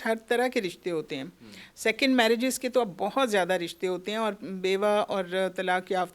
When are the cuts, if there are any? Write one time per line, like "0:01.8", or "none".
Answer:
none